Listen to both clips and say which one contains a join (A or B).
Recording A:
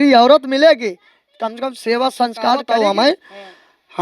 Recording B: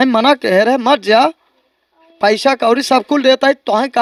A